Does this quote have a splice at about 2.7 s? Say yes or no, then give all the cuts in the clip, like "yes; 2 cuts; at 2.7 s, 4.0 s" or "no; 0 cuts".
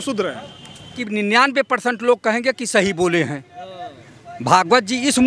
no; 1 cut; at 1.0 s